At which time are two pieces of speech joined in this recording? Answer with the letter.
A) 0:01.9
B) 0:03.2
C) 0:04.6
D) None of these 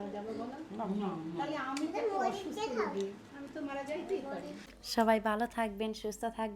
C